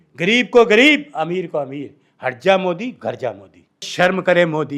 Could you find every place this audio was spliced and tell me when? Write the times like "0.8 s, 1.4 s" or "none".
3.9 s